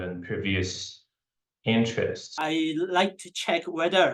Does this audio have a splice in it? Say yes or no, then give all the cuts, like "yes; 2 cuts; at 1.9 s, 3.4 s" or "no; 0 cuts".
yes; 1 cut; at 2.4 s